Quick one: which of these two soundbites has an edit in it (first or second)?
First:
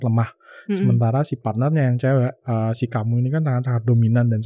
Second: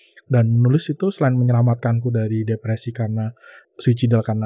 second